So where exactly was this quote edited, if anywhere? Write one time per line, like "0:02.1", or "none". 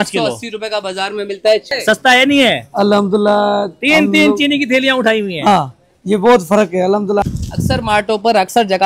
0:01.7
0:07.2